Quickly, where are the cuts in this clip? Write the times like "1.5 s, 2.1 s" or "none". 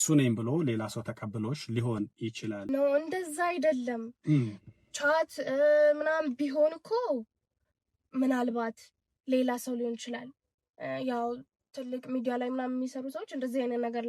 2.6 s